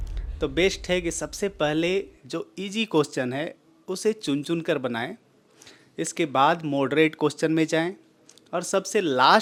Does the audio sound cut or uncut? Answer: uncut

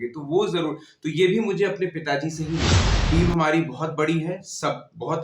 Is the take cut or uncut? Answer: cut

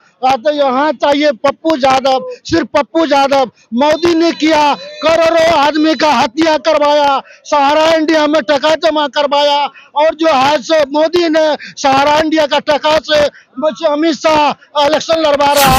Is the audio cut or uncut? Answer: uncut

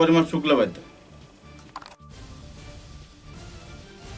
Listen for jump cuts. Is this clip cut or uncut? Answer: uncut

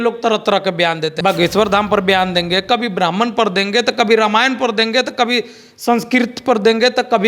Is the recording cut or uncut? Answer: cut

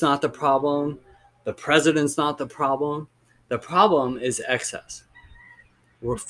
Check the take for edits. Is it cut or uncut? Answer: uncut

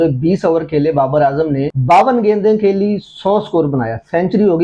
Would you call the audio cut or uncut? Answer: uncut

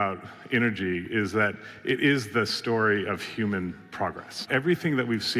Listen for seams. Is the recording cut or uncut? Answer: cut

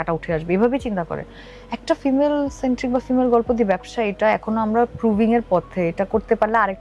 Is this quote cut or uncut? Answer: uncut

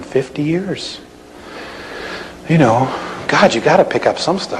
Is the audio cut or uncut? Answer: cut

